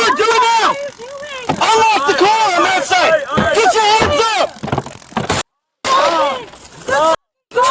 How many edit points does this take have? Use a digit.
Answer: 0